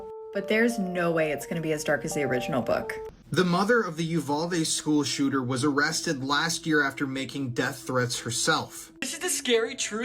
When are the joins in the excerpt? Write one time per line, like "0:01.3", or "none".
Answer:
0:03.1
0:09.1